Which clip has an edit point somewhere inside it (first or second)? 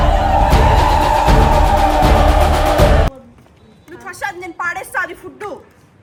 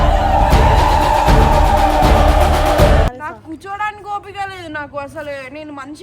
second